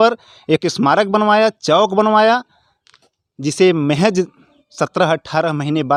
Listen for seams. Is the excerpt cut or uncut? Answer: uncut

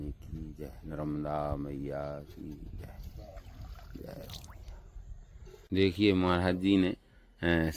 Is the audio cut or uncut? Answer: cut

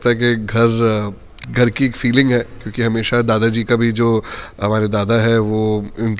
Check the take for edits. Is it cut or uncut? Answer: uncut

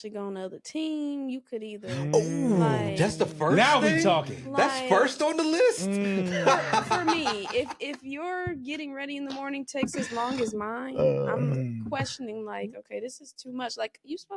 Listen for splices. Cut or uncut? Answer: uncut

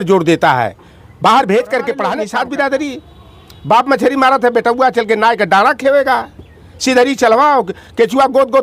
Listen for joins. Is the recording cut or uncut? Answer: cut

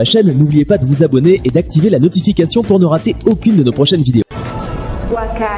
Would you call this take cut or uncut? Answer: cut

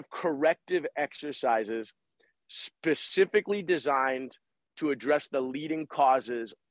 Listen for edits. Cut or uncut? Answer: uncut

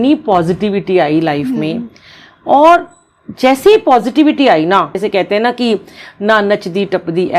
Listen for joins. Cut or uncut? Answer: cut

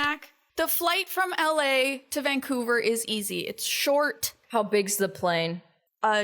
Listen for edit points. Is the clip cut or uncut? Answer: cut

